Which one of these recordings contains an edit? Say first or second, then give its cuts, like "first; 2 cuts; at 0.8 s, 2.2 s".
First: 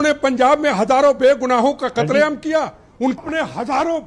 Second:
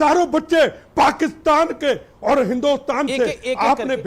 first; 1 cut; at 3.2 s